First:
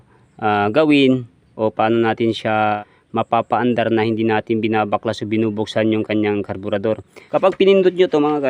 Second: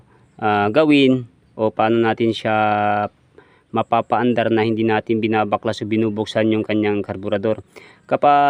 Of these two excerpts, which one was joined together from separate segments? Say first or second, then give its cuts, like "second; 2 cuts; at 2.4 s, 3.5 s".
first; 2 cuts; at 2.8 s, 7.1 s